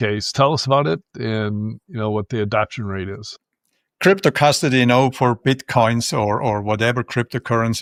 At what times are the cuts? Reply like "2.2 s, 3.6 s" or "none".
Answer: none